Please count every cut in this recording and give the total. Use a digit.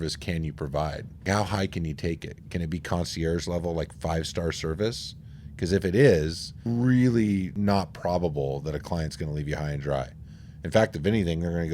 3